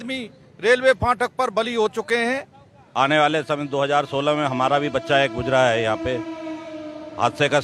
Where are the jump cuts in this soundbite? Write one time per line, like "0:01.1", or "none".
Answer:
0:02.9